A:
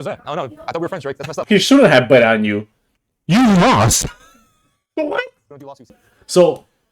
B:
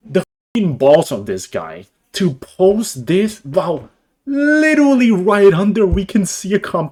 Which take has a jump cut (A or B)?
A